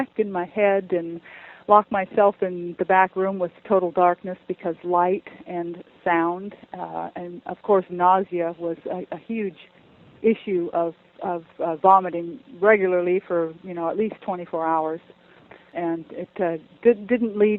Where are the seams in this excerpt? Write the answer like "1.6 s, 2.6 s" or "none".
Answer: 15.8 s